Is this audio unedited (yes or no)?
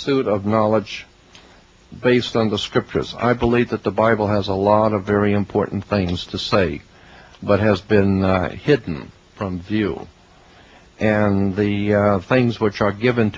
no